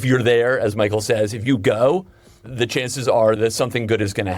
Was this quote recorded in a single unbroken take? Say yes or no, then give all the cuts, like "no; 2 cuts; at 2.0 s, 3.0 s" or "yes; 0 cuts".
no; 2 cuts; at 2.4 s, 3.4 s